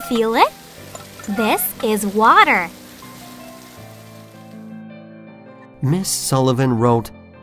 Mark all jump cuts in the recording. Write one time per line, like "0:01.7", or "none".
0:02.7